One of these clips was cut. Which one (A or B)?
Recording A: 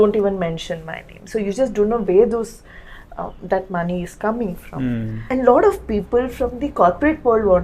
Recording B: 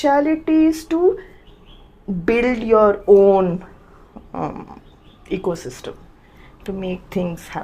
A